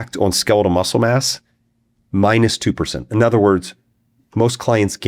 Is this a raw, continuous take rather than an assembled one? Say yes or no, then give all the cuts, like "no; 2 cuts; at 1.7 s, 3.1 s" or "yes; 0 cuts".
yes; 0 cuts